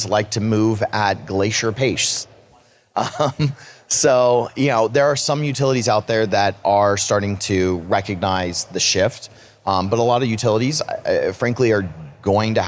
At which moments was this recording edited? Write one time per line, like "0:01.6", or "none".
none